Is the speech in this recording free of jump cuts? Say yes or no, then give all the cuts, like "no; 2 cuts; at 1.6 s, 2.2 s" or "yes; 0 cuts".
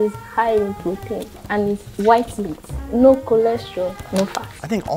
yes; 0 cuts